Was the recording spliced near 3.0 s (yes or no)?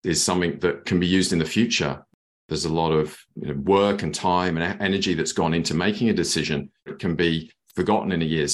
no